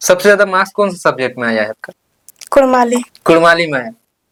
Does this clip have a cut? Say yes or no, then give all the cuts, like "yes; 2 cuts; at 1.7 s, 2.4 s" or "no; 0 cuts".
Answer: no; 0 cuts